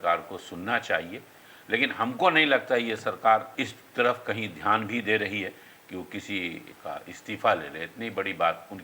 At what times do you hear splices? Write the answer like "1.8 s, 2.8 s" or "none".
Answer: 3.5 s, 6.7 s